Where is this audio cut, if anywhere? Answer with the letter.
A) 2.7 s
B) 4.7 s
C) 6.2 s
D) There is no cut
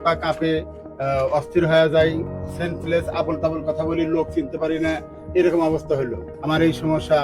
C